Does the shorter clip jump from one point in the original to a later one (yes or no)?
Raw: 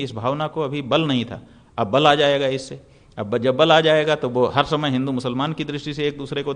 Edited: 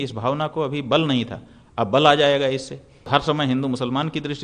yes